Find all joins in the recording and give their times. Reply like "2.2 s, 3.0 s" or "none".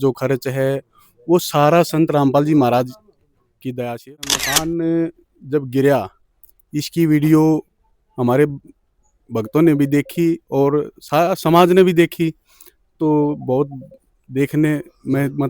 4.4 s